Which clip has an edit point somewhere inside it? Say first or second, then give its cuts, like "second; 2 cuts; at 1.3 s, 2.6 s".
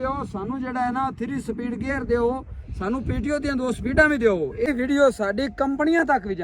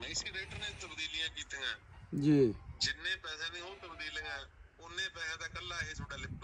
first; 1 cut; at 4.7 s